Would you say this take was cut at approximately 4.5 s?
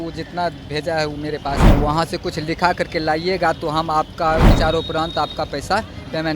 yes; 2 cuts; at 1.6 s, 4.5 s

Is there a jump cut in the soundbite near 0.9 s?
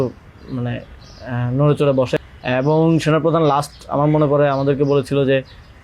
no; 1 cut; at 2.2 s

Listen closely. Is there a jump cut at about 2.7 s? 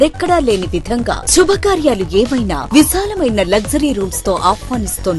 no; 0 cuts

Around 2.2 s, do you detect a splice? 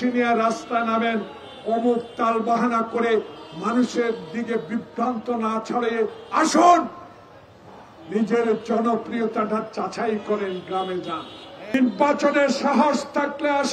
no; 1 cut; at 11.7 s

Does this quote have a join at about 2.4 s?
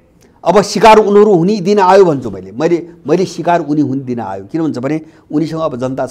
no; 0 cuts

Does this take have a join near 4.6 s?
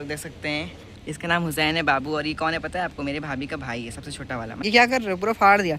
yes; 2 cuts; at 0.9 s, 4.6 s

